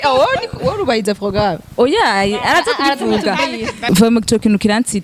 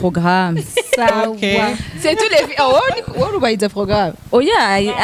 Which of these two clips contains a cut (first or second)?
first